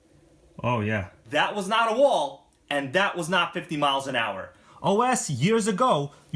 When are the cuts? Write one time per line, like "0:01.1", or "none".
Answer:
0:01.2
0:04.7